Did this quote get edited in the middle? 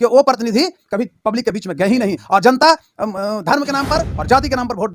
no; 0 cuts

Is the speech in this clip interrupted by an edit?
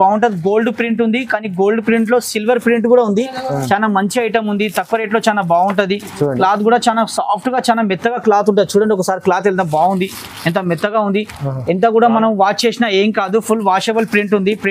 no; 0 cuts

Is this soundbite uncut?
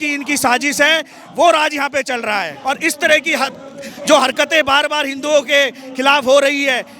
no; 1 cut; at 2.5 s

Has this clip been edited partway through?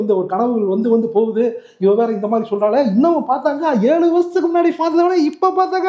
no; 0 cuts

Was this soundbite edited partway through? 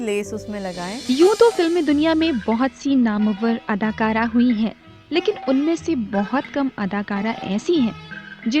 yes; 1 cut; at 1.0 s

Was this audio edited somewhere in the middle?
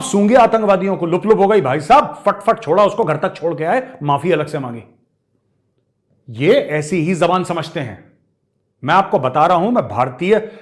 no; 0 cuts

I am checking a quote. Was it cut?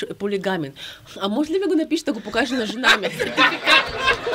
no; 0 cuts

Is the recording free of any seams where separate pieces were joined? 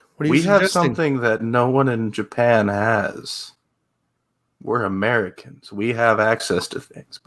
yes; 0 cuts

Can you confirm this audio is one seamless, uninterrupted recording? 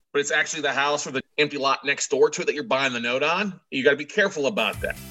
yes; 0 cuts

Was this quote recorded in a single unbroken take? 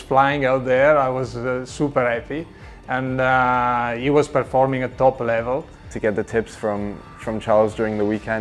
yes; 0 cuts

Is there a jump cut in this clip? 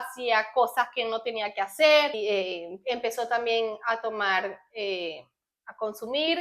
yes; 1 cut; at 2.2 s

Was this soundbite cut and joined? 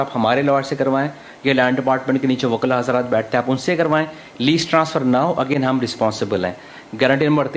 no; 0 cuts

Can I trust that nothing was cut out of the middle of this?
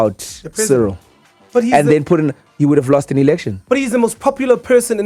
yes; 0 cuts

